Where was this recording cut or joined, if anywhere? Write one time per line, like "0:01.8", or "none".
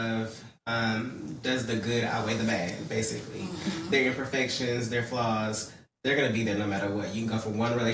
none